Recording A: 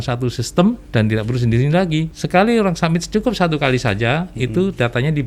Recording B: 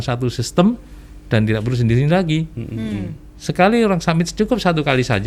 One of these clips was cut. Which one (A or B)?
A